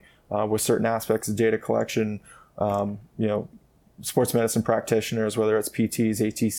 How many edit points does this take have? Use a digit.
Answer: 0